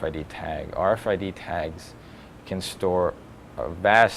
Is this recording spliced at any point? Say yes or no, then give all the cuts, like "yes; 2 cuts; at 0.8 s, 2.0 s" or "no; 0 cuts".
yes; 1 cut; at 1.0 s